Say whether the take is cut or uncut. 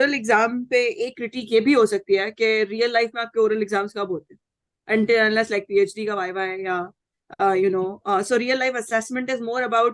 uncut